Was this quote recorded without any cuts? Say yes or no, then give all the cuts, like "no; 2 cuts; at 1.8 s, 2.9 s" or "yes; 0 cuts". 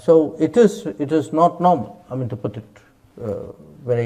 yes; 0 cuts